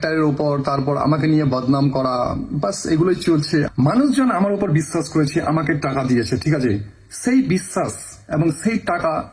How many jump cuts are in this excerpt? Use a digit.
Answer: 1